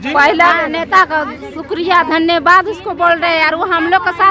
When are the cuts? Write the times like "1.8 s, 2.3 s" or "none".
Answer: none